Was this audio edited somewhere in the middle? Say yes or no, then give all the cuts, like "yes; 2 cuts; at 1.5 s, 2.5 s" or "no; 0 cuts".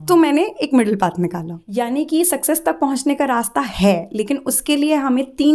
yes; 1 cut; at 1.6 s